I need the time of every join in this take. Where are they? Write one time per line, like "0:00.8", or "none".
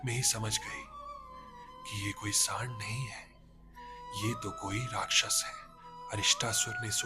0:06.0